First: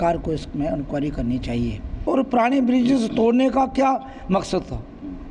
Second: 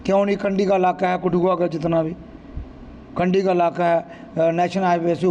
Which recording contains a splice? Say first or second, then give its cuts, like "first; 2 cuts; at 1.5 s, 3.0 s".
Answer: first; 1 cut; at 2.1 s